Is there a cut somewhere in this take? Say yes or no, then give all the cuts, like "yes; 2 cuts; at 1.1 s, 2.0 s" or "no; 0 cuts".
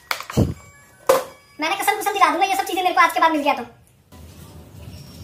yes; 1 cut; at 4.1 s